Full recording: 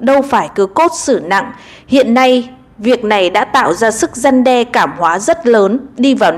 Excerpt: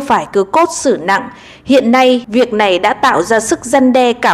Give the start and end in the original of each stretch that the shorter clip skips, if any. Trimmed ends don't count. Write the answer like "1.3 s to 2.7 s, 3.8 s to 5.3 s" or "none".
2.5 s to 2.8 s